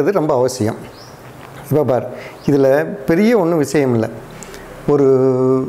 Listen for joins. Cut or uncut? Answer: uncut